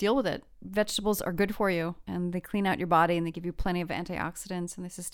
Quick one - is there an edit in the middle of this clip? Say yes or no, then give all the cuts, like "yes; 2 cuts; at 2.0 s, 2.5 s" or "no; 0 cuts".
yes; 1 cut; at 2.0 s